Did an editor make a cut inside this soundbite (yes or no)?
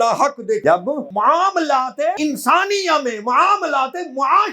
yes